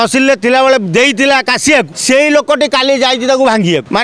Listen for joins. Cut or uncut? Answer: uncut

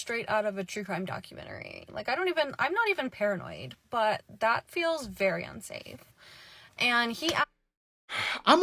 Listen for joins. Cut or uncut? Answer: uncut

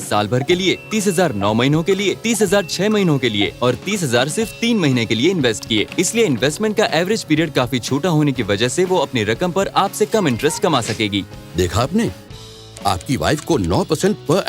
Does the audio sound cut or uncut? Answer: cut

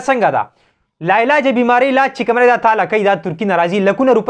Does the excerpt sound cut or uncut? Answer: uncut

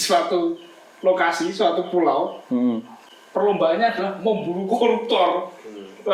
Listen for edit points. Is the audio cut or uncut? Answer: uncut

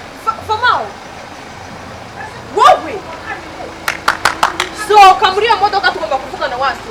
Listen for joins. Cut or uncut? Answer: uncut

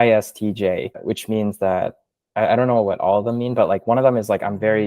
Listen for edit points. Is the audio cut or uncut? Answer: cut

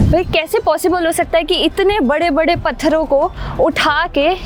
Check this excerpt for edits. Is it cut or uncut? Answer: uncut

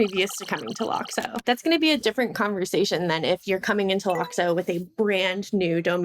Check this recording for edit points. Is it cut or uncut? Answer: cut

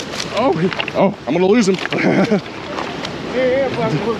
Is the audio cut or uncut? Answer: uncut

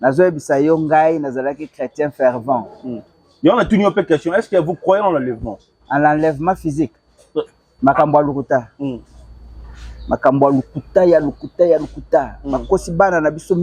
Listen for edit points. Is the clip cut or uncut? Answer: uncut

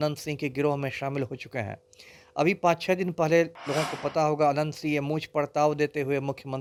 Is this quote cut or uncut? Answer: uncut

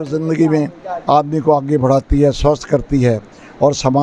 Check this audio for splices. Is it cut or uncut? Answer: uncut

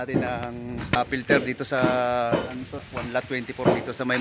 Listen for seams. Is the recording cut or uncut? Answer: cut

